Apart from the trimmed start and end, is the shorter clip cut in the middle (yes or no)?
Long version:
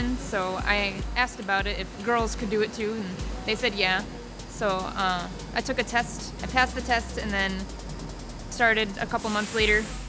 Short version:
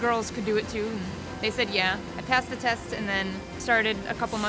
yes